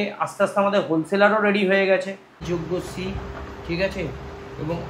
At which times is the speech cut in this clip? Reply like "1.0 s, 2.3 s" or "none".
2.3 s